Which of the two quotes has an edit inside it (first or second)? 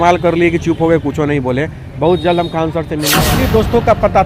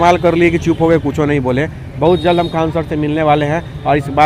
first